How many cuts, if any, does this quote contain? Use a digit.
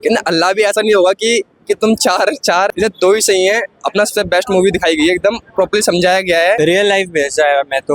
2